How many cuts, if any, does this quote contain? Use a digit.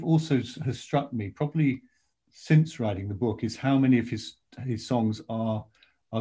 0